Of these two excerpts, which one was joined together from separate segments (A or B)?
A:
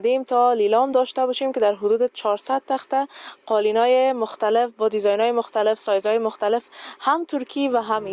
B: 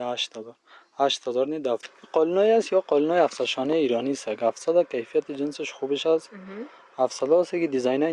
B